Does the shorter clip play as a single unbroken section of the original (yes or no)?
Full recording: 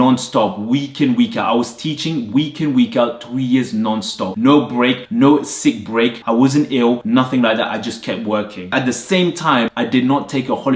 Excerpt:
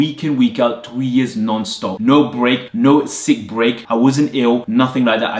yes